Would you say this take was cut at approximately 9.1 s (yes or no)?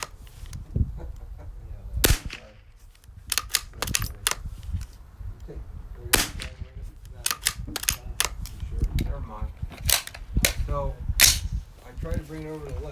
yes